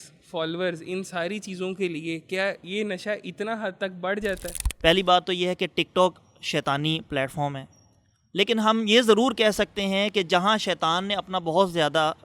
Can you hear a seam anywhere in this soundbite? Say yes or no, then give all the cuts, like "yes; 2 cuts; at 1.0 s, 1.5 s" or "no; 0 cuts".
yes; 2 cuts; at 2.6 s, 4.5 s